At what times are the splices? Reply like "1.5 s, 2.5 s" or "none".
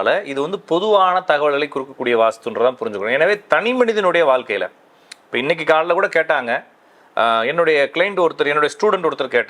none